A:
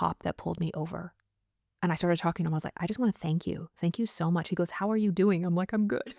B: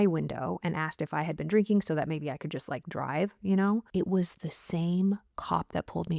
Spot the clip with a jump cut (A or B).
B